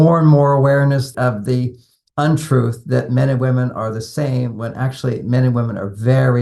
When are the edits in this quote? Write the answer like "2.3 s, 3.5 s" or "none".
1.1 s